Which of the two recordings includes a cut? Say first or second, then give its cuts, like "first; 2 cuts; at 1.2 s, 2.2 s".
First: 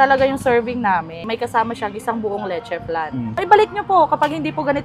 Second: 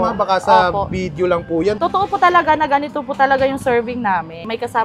second; 1 cut; at 1.8 s